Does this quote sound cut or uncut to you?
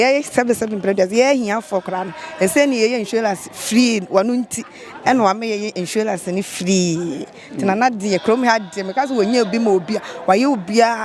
uncut